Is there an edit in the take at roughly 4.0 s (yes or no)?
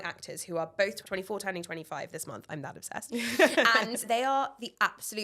yes